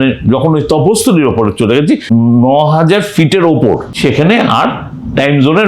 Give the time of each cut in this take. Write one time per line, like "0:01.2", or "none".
0:02.0
0:03.9